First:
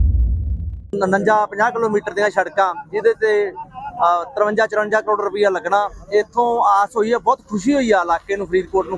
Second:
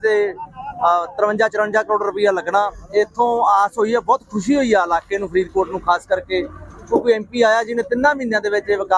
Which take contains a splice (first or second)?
first